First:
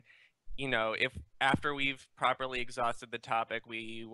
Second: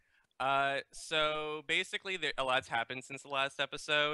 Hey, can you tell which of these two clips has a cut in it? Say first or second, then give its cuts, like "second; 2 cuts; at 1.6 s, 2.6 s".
first; 1 cut; at 1.9 s